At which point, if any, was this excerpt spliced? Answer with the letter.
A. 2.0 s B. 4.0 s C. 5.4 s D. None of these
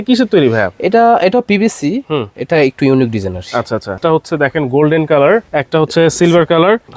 B